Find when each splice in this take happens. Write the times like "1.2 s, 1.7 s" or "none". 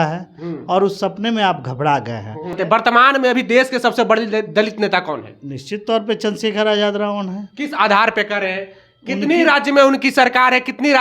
2.5 s